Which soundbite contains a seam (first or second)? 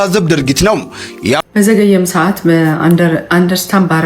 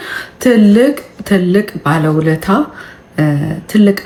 first